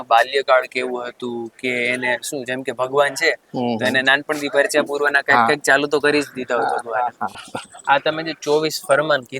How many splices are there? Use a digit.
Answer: 1